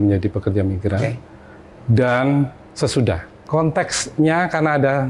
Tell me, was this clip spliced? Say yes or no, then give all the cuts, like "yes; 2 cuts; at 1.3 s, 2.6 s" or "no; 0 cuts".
yes; 1 cut; at 3.3 s